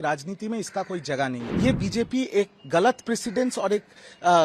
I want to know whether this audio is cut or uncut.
cut